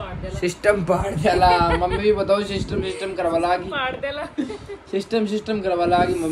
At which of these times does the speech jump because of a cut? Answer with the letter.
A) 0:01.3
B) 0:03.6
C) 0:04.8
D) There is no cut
D